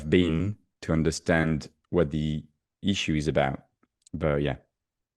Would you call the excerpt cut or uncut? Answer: uncut